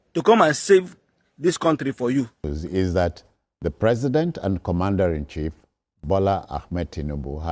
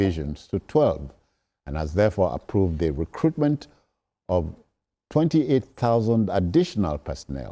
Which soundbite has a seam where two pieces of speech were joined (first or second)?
first